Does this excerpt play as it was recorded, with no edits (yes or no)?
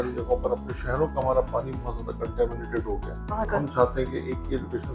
no